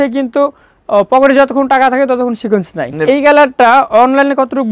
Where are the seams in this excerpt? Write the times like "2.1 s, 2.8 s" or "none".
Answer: 2.9 s